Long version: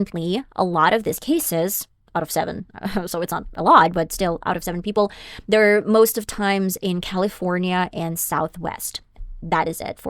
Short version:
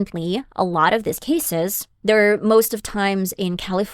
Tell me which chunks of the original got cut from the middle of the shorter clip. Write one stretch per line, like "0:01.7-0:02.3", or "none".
0:01.9-0:05.3